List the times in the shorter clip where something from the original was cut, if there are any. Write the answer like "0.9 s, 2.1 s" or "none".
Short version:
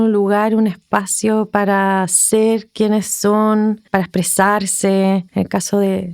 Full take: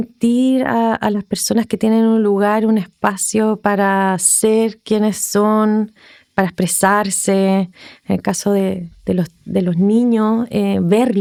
3.8 s, 5.3 s